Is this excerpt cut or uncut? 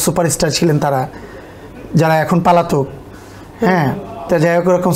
uncut